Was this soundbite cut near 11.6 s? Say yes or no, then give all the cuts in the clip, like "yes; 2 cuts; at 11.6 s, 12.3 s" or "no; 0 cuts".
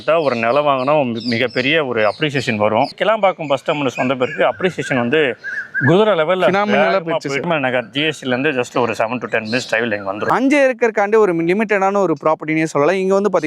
no; 3 cuts; at 2.9 s, 7.4 s, 10.3 s